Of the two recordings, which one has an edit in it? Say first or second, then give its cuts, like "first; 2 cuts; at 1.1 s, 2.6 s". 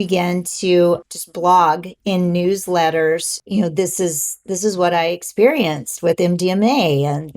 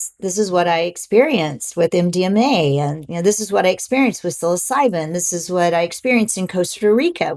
first; 2 cuts; at 1.1 s, 3.4 s